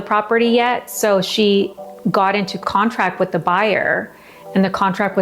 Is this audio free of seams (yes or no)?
yes